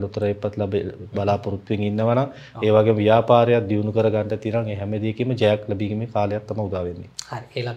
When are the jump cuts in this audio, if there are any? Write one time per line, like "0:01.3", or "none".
none